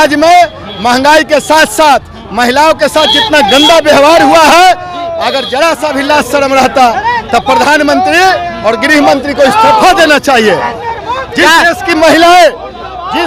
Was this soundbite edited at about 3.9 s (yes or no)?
no